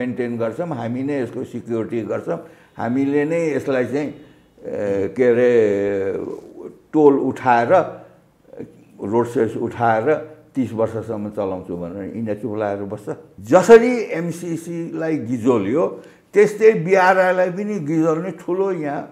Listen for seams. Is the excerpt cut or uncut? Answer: cut